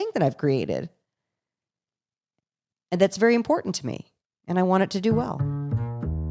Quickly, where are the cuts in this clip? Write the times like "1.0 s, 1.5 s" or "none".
5.4 s